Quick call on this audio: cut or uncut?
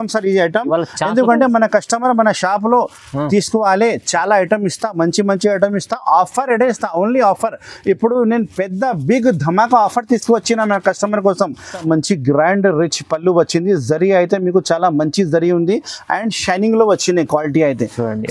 cut